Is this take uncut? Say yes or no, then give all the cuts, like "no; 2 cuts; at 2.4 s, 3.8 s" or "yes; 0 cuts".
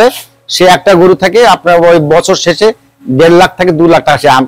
yes; 0 cuts